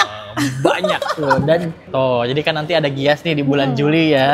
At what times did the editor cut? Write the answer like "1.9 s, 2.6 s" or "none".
1.8 s